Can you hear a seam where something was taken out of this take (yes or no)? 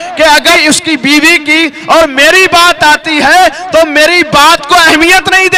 no